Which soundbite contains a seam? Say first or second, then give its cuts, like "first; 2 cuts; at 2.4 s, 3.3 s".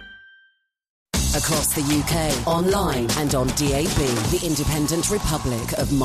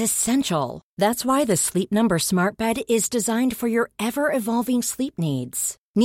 first; 1 cut; at 1.1 s